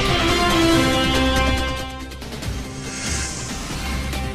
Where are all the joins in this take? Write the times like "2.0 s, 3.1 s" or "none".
3.1 s